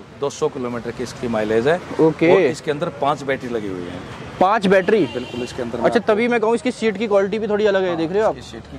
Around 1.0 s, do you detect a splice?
no; 0 cuts

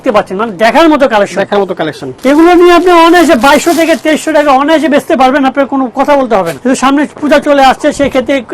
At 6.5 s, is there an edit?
yes; 2 cuts; at 2.1 s, 6.5 s

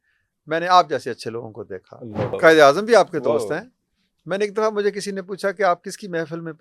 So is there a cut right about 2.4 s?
yes; 1 cut; at 2.4 s

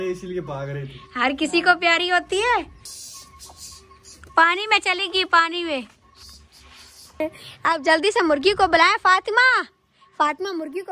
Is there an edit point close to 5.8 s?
no; 2 cuts; at 2.8 s, 7.2 s

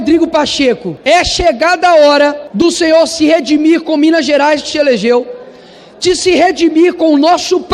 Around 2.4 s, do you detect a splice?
yes; 2 cuts; at 0.9 s, 2.4 s

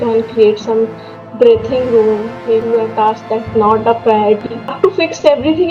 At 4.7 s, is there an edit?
yes; 2 cuts; at 2.6 s, 4.7 s

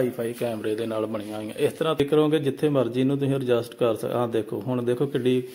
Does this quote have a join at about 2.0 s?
yes; 1 cut; at 2.0 s

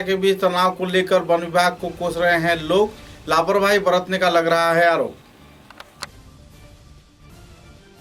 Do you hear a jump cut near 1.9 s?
no; 0 cuts

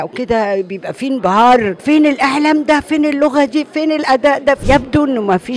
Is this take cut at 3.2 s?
no; 2 cuts; at 1.7 s, 4.6 s

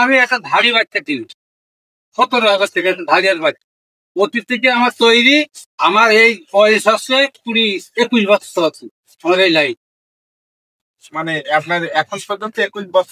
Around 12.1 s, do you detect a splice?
no; 0 cuts

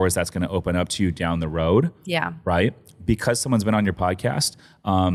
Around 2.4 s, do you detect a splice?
no; 0 cuts

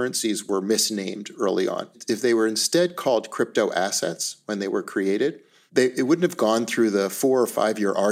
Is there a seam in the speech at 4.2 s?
no; 1 cut; at 2.0 s

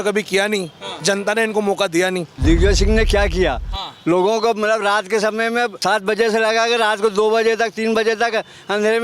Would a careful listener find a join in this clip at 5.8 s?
yes; 2 cuts; at 2.3 s, 5.8 s

